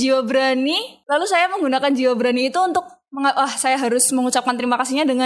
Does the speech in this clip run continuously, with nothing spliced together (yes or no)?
no